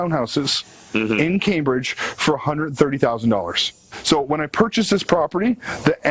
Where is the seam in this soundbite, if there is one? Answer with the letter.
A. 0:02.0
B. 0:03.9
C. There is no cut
B